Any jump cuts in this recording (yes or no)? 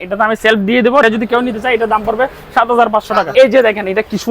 yes